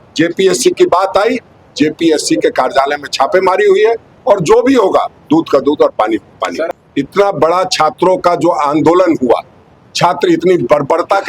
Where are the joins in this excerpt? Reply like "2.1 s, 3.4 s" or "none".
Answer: 6.6 s